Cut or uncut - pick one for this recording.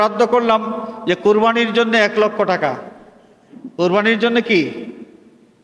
uncut